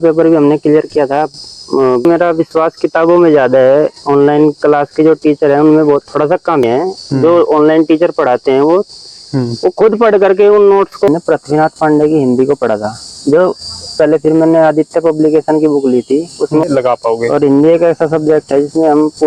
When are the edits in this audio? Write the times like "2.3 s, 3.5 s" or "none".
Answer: 2.1 s, 6.6 s, 11.1 s, 14.0 s, 16.6 s